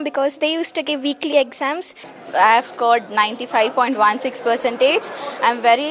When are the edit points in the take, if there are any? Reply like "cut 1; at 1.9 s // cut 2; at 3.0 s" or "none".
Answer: cut 1; at 2.1 s